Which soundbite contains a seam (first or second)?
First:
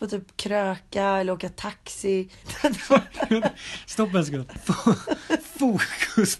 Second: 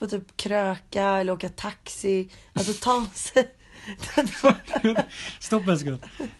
first